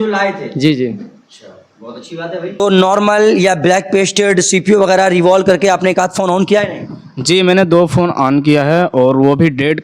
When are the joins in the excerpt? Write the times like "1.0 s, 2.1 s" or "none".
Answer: 2.6 s